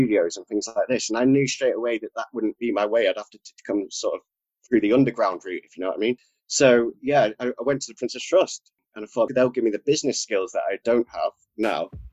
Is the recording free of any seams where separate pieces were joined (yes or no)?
yes